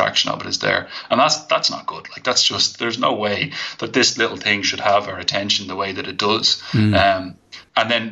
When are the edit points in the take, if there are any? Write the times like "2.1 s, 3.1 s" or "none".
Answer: none